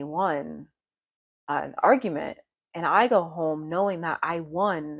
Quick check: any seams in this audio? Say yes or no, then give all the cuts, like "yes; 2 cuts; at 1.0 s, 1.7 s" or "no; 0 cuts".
no; 0 cuts